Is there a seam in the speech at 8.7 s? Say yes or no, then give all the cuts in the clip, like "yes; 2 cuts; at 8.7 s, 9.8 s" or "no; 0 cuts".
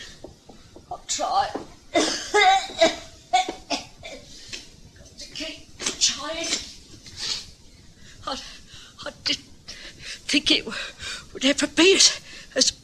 no; 1 cut; at 10.5 s